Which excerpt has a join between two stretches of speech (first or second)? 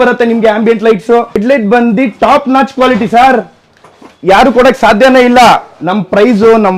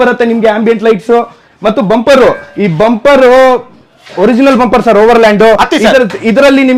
first